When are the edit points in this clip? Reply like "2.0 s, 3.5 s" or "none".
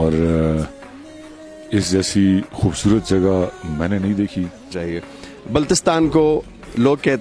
4.8 s